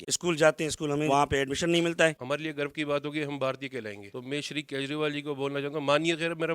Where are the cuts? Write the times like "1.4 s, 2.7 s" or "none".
1.1 s, 2.2 s, 4.1 s